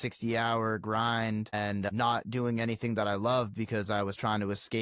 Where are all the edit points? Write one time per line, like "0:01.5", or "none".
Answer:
none

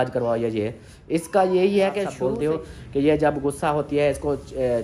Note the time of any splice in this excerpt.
0:02.1

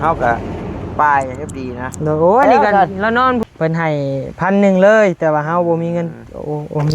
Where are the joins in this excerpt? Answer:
0:03.4

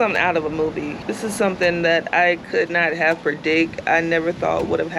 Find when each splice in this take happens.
0:01.0

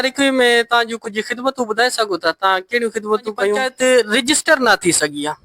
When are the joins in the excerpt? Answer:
0:03.6

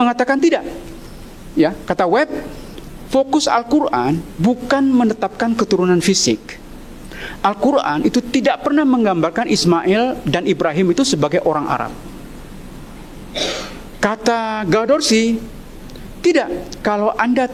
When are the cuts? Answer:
none

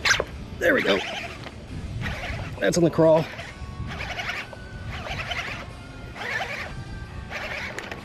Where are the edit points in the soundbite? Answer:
none

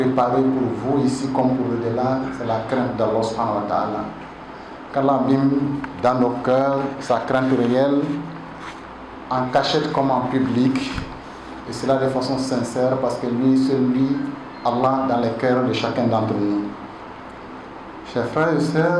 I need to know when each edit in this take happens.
none

